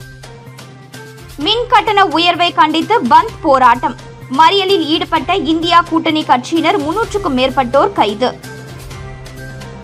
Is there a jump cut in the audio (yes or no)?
yes